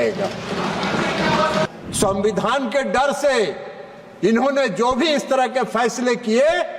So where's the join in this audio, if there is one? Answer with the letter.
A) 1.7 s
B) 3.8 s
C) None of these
A